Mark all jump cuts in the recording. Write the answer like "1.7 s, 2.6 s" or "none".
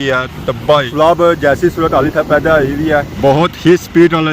0.9 s, 3.1 s